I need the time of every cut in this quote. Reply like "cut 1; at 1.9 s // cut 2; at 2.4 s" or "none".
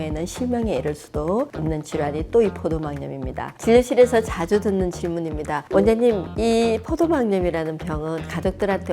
cut 1; at 3.4 s